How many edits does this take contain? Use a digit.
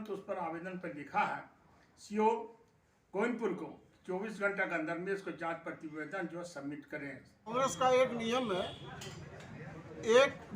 1